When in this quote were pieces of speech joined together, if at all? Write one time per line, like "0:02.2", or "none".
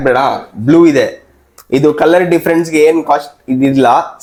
none